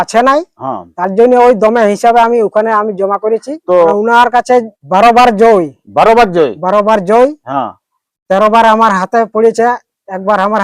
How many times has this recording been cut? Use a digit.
2